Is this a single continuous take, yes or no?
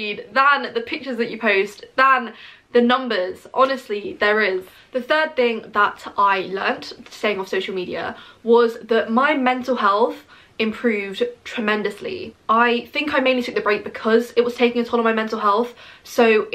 yes